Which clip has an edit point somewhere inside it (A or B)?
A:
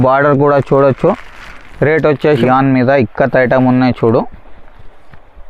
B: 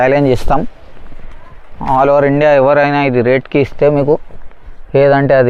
A